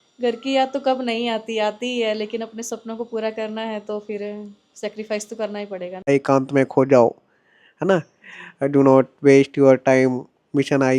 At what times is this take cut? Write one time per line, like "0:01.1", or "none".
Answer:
0:06.1